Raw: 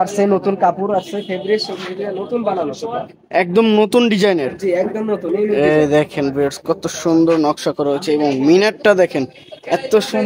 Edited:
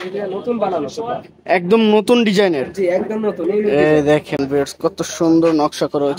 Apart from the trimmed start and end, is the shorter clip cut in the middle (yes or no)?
no